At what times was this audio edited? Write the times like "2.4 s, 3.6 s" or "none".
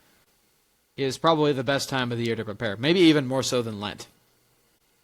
none

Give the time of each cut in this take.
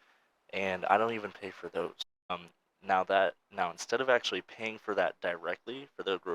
2.3 s

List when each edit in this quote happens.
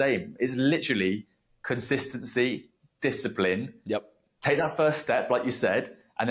none

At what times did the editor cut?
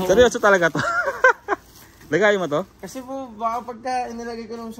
none

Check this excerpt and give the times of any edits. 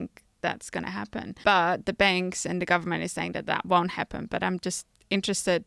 1.3 s

